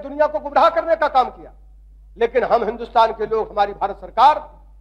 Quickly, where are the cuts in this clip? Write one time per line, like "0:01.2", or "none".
none